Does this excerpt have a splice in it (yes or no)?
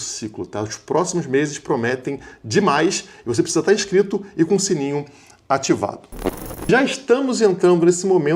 yes